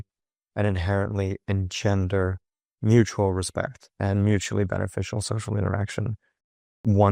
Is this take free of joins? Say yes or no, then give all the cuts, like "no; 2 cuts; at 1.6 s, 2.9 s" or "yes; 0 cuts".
yes; 0 cuts